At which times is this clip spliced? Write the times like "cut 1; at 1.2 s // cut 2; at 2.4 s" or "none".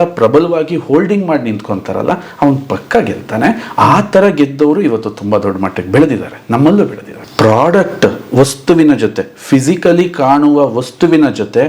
cut 1; at 7.1 s

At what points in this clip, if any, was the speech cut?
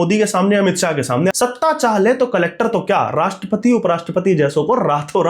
cut 1; at 1.3 s

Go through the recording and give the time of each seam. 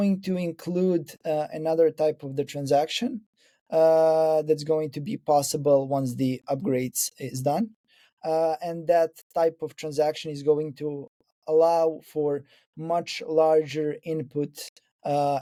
none

